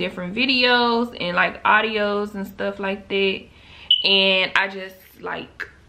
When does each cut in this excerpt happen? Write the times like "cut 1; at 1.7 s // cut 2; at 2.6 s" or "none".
none